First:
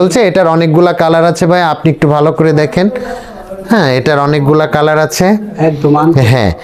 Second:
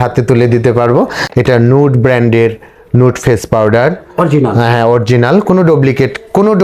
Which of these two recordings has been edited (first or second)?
second